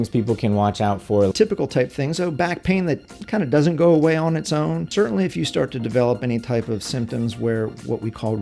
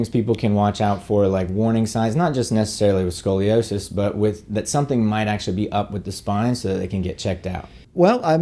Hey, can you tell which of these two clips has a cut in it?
first; 2 cuts; at 1.3 s, 4.9 s

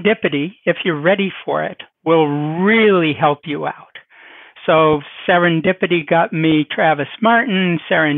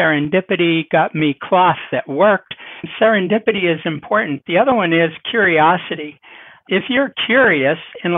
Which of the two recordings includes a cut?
second; 1 cut; at 2.9 s

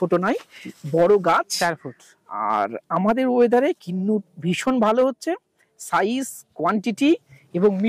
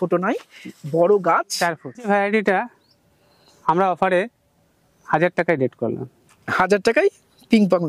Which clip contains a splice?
second; 1 cut; at 2.1 s

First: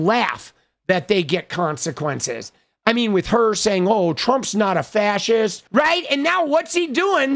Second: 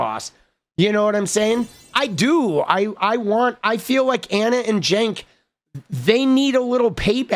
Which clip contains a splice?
first; 1 cut; at 5.6 s

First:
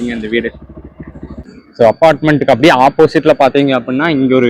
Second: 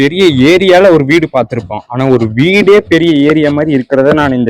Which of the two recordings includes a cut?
first; 1 cut; at 1.4 s

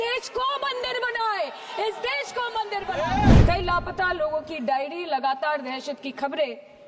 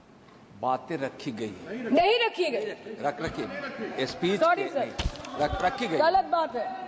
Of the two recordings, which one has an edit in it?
first; 1 cut; at 3.4 s

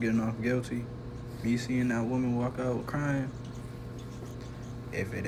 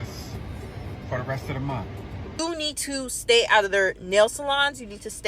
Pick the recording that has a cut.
second; 1 cut; at 2.4 s

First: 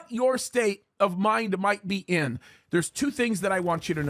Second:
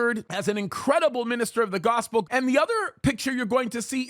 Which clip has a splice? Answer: second; 1 cut; at 2.2 s

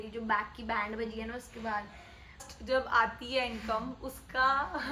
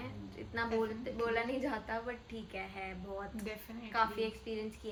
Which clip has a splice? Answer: first; 1 cut; at 2.5 s

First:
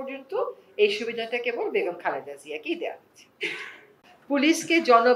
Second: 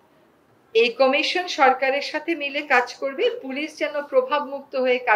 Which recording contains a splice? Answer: first; 1 cut; at 3.8 s

